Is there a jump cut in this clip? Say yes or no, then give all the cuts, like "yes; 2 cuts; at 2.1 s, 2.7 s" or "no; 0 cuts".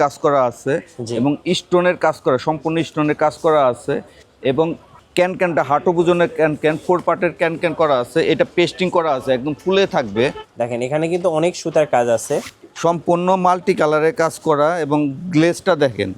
yes; 1 cut; at 10.4 s